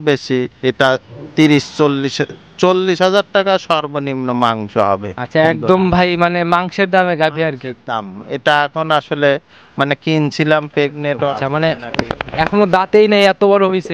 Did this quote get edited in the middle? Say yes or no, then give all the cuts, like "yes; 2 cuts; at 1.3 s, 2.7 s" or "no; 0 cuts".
yes; 1 cut; at 11.4 s